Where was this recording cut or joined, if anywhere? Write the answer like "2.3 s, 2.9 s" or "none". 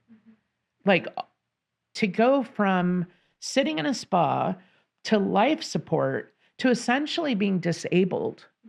1.9 s

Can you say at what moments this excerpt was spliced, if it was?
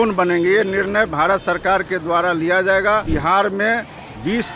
3.1 s

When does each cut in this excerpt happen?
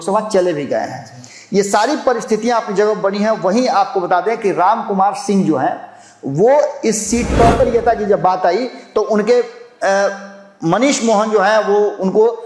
7.6 s

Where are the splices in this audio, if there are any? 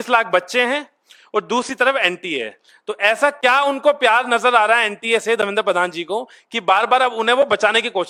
none

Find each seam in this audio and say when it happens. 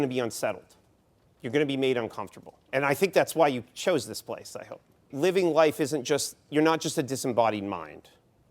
2.6 s, 5.1 s

